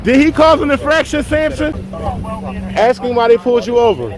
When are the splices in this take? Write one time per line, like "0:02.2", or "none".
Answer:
0:01.9